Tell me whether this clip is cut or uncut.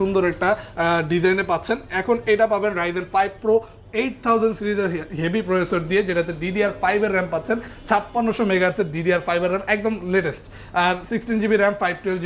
uncut